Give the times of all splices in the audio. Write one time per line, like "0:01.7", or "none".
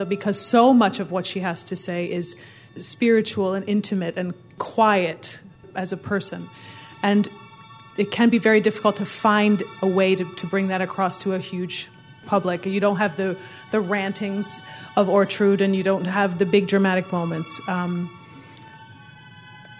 0:02.6
0:04.5
0:05.7
0:07.7
0:12.2

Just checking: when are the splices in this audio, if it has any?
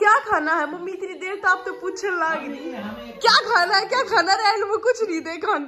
none

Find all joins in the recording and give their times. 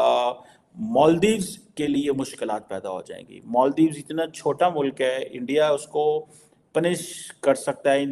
none

